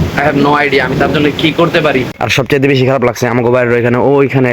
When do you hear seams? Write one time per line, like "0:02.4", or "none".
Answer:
0:02.2

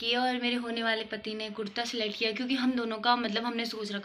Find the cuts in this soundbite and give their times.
none

